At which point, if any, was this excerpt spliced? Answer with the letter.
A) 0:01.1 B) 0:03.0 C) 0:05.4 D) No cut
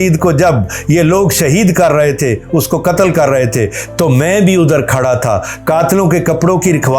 D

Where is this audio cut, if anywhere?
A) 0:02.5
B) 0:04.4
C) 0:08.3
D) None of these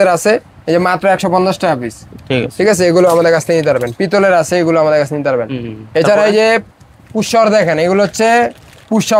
D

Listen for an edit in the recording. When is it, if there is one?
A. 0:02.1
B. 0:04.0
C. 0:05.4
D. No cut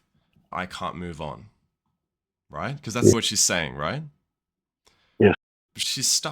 C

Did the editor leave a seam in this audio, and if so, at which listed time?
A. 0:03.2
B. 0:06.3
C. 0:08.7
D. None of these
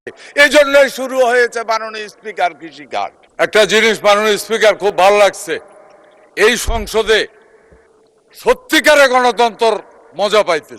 A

